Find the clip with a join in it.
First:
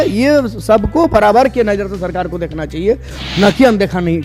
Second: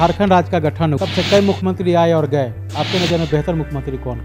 second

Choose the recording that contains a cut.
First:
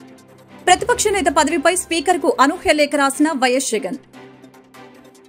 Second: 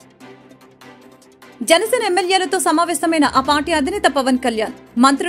second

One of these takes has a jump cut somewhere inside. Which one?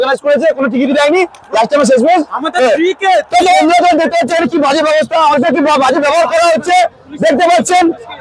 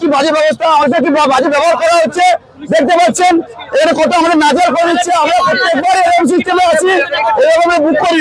first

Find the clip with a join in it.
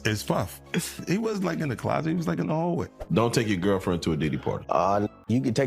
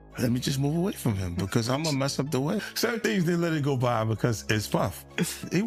first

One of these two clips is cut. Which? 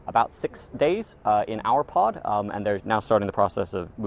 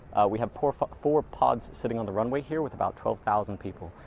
first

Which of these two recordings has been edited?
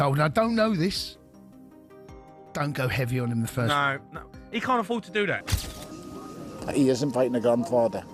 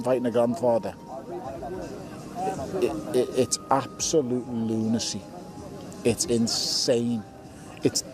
first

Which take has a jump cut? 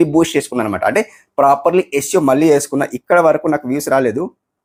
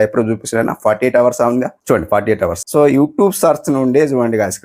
second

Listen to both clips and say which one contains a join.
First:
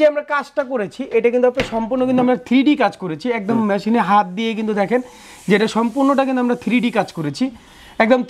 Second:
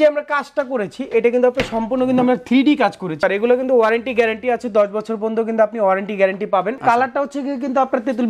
second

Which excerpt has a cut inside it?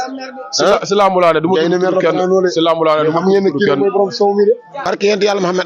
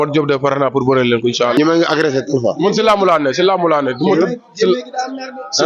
first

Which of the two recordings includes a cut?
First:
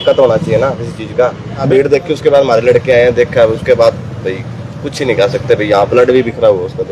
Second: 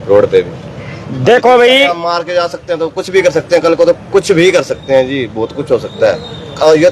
first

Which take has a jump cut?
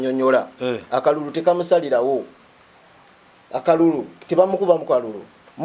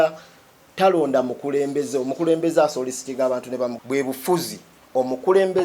second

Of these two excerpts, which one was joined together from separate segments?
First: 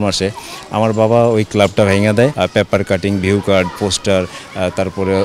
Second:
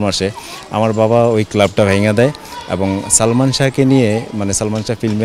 first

